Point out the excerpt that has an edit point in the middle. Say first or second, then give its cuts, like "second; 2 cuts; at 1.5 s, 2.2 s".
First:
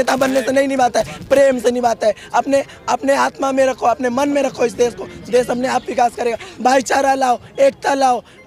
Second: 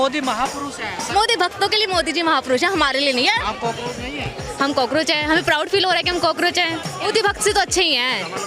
second; 3 cuts; at 1.0 s, 3.4 s, 7.1 s